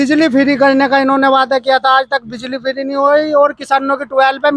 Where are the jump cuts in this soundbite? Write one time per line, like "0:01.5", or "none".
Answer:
none

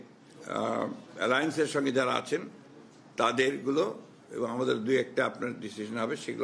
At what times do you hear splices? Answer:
none

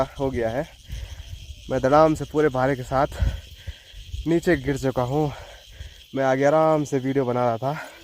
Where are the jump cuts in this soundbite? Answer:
none

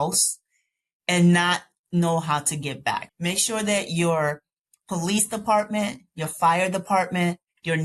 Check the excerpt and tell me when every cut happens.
0:03.1

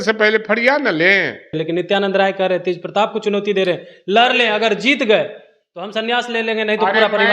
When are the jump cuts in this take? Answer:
0:01.6

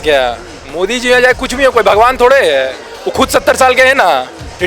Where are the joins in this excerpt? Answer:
none

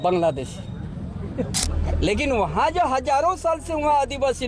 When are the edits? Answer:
0:01.7

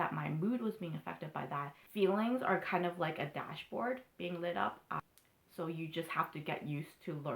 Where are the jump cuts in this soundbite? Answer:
0:01.8
0:05.0

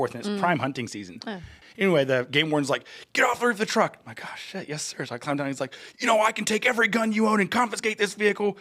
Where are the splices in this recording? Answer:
0:01.6

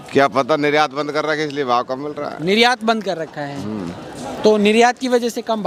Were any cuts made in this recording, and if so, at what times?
none

